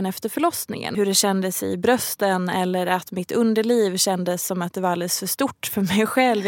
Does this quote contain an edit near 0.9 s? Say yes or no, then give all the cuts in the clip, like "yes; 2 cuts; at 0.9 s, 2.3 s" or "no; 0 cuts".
yes; 1 cut; at 0.9 s